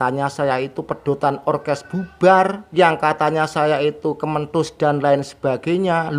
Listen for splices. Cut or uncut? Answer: cut